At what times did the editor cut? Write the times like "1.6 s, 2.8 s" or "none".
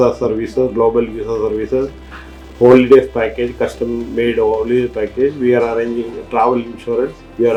none